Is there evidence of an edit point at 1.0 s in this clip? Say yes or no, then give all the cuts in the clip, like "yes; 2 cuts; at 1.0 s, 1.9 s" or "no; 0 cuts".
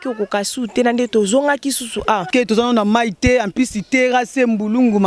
no; 1 cut; at 2.3 s